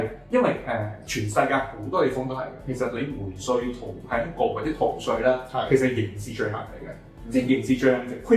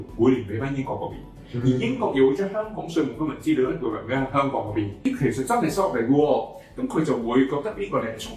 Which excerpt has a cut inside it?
second; 1 cut; at 5.0 s

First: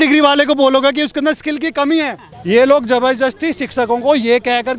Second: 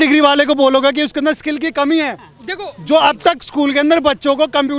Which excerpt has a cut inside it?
first; 1 cut; at 2.3 s

